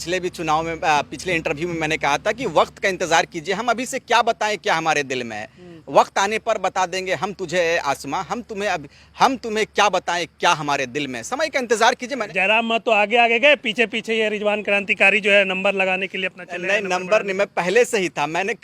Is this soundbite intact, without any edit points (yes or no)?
no